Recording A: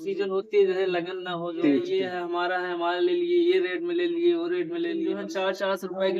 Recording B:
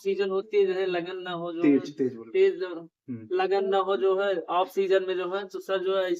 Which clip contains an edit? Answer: A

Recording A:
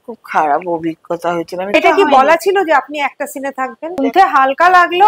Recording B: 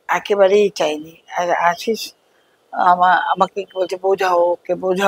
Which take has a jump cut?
A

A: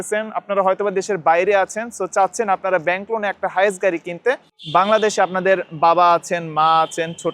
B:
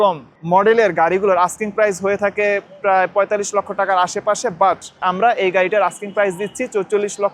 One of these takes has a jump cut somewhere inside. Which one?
A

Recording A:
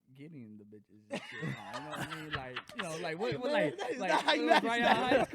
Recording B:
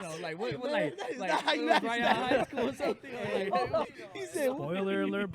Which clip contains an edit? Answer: B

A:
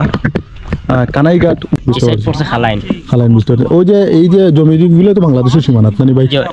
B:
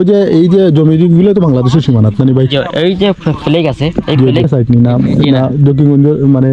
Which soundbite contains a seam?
A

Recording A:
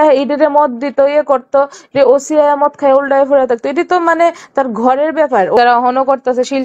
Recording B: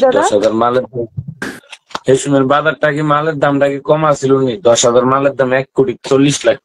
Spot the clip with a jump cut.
A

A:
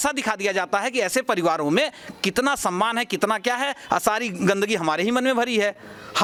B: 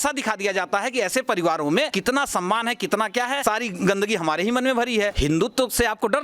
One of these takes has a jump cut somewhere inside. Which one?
B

